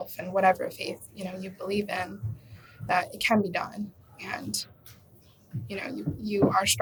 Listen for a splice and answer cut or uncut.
uncut